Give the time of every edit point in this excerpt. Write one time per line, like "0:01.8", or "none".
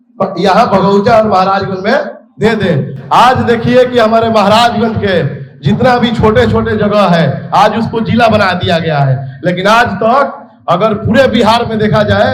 none